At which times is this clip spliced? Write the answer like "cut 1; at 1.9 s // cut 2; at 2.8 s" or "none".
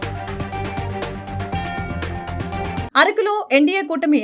cut 1; at 2.9 s